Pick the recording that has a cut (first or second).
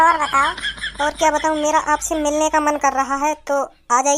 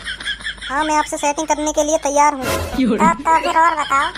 second